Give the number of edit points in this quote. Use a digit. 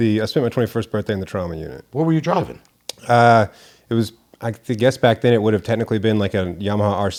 0